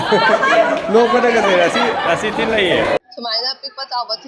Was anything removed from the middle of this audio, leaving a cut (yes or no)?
yes